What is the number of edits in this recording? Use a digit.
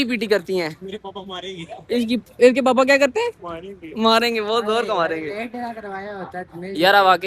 0